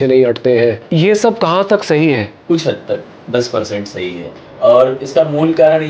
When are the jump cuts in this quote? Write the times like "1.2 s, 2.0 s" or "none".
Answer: 0.8 s, 4.4 s